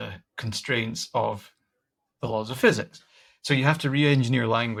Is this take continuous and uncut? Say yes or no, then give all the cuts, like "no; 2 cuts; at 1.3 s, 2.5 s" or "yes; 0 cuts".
yes; 0 cuts